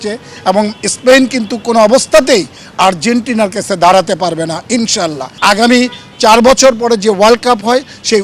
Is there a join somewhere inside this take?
yes; 1 cut; at 5.3 s

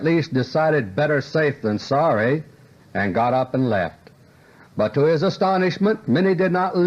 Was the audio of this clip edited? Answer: no; 0 cuts

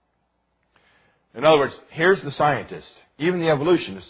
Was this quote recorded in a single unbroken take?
yes; 0 cuts

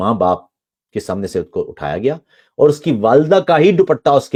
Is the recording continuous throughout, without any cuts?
yes; 0 cuts

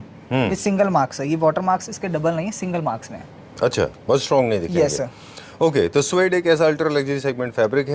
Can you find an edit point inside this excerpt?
no; 0 cuts

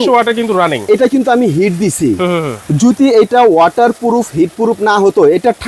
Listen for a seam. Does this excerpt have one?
no; 0 cuts

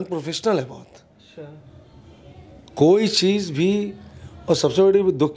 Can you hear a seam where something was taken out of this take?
no; 0 cuts

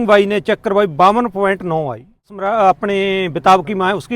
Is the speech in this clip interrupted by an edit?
yes; 1 cut; at 2.4 s

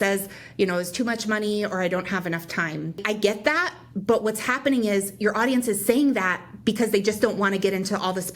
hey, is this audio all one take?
no; 1 cut; at 3.0 s

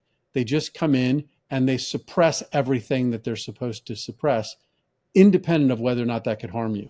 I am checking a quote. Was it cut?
no; 0 cuts

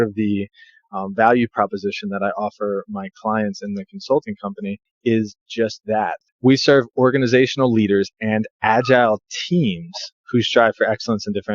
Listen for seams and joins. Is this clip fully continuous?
no; 2 cuts; at 4.9 s, 6.2 s

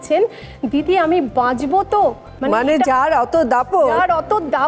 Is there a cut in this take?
yes; 1 cut; at 2.3 s

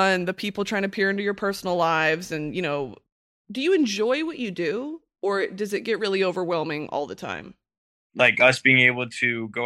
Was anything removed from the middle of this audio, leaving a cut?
yes; 2 cuts; at 3.1 s, 8.1 s

